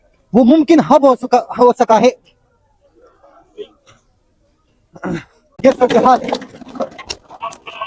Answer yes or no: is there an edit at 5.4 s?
yes